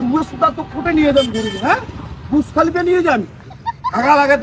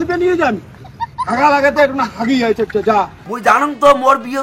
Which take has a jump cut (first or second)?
second